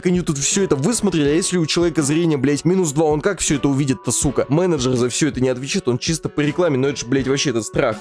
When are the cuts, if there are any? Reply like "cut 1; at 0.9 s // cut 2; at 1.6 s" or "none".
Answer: cut 1; at 4.4 s